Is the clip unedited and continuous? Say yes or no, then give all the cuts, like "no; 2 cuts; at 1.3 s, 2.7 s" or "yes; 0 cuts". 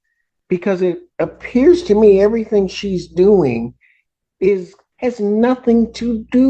no; 1 cut; at 4.8 s